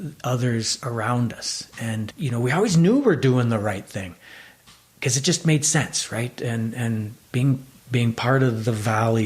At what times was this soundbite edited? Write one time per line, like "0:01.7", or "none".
none